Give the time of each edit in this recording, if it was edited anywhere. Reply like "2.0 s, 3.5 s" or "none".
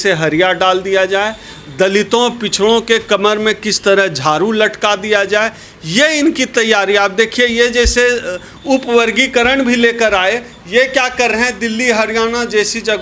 none

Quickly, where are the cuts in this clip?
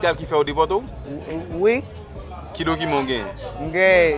none

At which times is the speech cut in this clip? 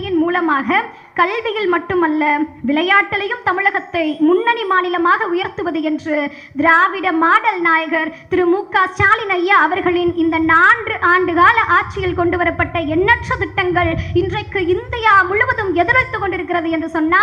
none

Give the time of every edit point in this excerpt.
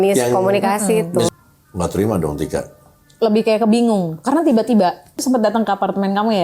1.3 s, 5.2 s

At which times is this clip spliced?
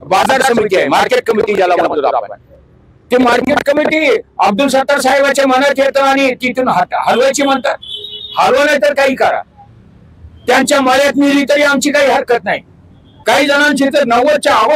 13.1 s

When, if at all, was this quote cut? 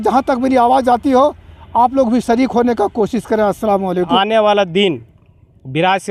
4.1 s

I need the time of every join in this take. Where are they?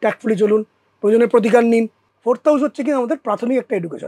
2.0 s

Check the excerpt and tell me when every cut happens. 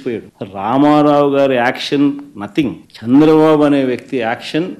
none

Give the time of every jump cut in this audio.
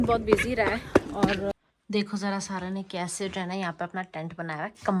1.5 s

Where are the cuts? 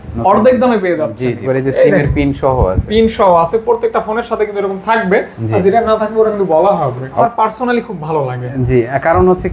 1.4 s, 7.2 s

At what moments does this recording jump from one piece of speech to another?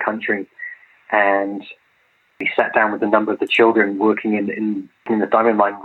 2.4 s

